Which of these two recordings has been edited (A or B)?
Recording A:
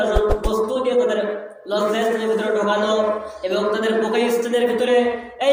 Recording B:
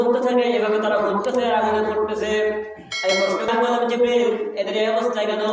B